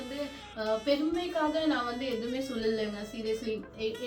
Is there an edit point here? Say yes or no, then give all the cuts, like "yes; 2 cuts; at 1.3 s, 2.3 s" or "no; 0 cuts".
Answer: no; 0 cuts